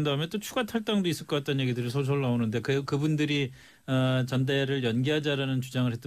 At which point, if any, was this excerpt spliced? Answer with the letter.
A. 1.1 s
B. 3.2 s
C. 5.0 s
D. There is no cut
D